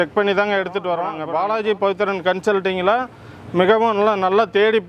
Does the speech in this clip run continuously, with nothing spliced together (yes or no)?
no